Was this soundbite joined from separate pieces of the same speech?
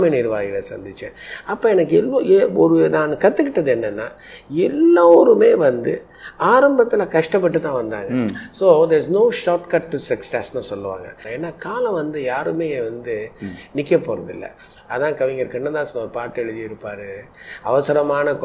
yes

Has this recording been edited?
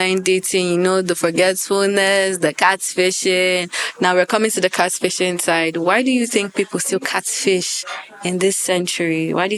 no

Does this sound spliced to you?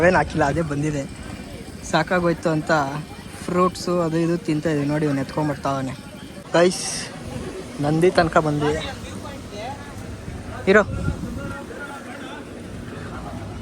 yes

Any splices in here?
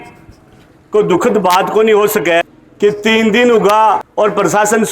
yes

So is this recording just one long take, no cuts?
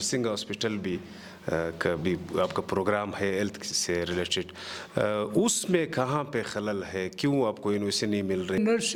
yes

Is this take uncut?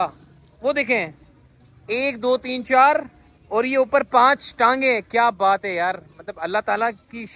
yes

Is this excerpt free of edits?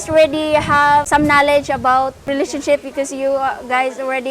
no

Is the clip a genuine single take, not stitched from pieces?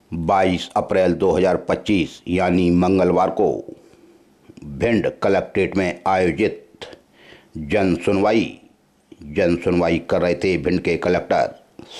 yes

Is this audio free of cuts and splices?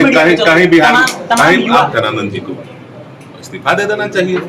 no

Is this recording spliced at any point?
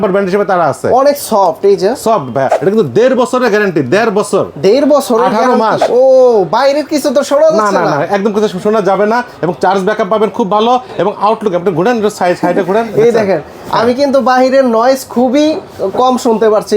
yes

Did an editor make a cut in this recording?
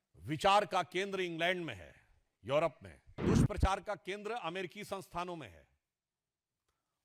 yes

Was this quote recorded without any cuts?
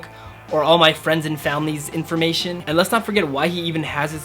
no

